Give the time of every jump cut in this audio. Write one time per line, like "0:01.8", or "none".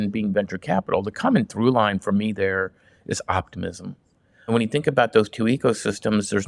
0:04.5